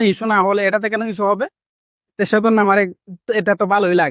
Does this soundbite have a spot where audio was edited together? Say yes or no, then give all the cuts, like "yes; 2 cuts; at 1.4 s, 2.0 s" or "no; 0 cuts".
no; 0 cuts